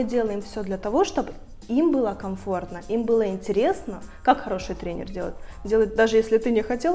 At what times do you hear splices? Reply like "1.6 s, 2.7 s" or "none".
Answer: none